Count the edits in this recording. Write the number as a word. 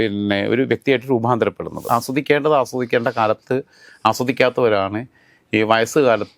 one